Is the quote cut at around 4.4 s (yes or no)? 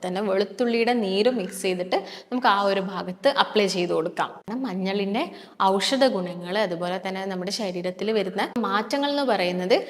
yes